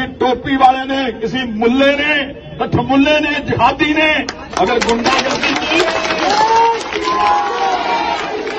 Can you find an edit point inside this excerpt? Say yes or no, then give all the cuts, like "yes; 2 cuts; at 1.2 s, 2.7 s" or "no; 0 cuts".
no; 0 cuts